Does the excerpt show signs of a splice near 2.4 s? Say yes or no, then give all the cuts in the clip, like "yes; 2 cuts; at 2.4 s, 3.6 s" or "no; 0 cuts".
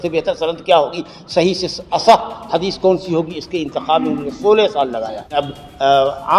no; 1 cut; at 5.2 s